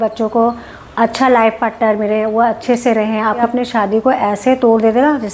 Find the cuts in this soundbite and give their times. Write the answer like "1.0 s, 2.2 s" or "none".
3.4 s